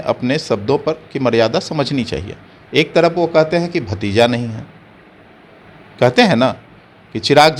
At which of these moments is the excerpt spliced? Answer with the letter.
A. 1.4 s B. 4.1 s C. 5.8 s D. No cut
D